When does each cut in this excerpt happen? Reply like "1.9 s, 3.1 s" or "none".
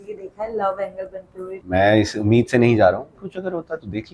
1.6 s, 3.2 s

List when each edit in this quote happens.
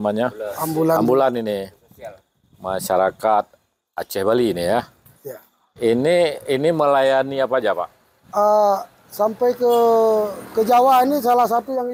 none

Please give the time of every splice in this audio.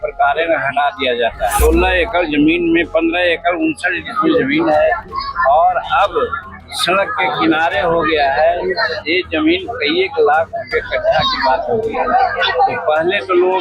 1.6 s

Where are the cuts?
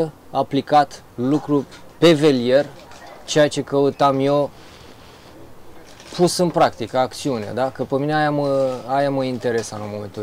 none

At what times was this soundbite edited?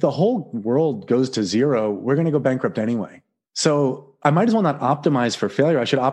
none

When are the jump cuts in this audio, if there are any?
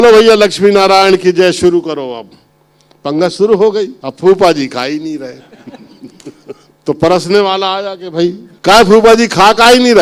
4.0 s, 6.7 s, 8.5 s

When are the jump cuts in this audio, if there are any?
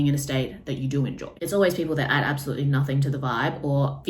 1.4 s

